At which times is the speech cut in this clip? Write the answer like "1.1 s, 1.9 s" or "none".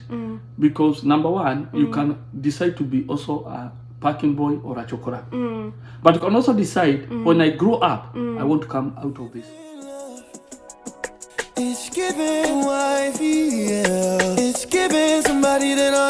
9.3 s